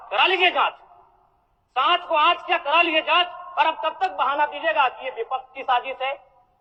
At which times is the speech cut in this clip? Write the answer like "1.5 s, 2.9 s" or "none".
none